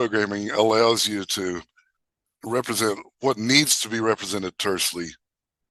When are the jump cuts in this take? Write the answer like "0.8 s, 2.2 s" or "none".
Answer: none